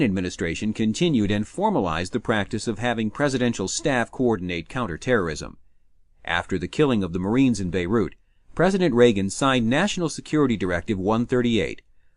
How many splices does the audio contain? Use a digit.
1